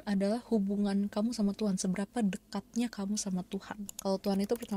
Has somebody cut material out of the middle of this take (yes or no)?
no